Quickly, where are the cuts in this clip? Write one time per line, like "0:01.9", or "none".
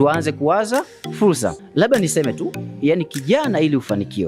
0:01.6